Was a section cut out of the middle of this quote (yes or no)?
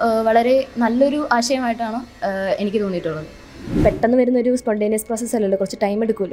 yes